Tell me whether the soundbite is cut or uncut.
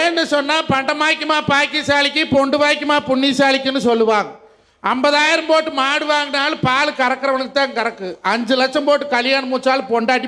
uncut